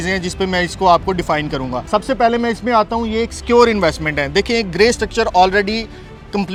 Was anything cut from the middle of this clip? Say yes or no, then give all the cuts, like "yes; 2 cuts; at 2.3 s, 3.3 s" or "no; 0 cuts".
no; 0 cuts